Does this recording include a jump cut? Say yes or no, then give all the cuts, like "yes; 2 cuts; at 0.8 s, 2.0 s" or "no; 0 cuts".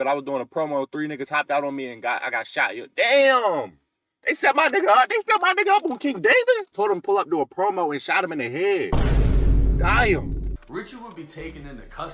yes; 2 cuts; at 6.7 s, 10.5 s